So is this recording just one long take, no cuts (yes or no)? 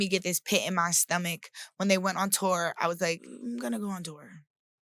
no